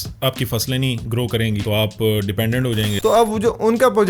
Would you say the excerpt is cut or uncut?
cut